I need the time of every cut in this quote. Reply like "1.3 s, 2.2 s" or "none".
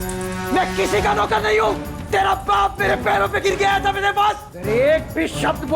4.5 s